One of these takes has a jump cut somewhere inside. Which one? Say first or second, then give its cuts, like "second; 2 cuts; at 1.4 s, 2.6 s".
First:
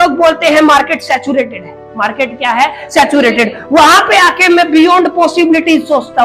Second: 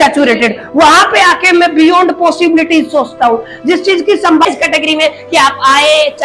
second; 1 cut; at 4.4 s